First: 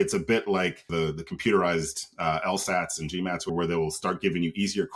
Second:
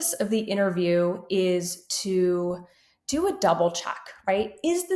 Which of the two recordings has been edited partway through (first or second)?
first